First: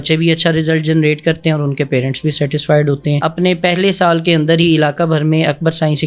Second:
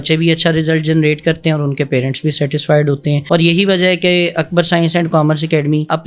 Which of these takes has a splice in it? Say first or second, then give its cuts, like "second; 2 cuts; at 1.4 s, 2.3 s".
first; 1 cut; at 3.2 s